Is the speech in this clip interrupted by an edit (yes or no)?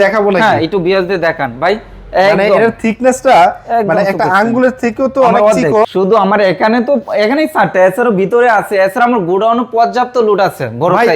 yes